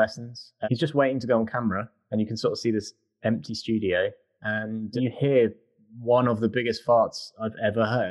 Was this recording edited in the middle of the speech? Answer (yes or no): no